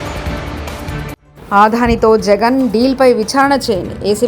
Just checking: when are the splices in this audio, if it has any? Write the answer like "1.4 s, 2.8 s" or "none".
1.2 s